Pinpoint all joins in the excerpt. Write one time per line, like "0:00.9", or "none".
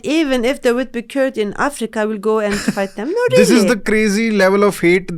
none